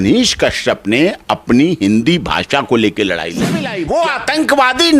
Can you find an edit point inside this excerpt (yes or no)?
yes